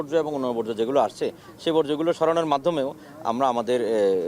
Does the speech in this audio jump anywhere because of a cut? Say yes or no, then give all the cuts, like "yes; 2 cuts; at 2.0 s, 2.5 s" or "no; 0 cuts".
no; 0 cuts